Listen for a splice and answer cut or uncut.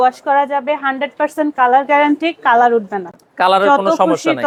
uncut